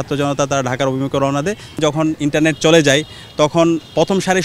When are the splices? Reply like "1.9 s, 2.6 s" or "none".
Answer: 1.8 s